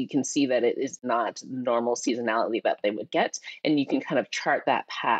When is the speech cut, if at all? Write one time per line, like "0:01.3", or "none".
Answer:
0:01.0